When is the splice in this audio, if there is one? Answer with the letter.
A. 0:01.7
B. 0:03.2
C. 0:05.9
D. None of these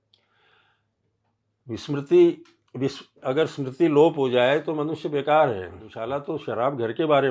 C